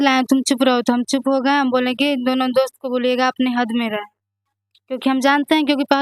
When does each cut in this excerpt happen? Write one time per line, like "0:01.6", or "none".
none